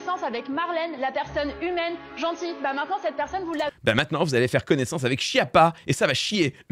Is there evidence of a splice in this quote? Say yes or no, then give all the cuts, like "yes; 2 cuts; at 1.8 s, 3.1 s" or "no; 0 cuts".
no; 0 cuts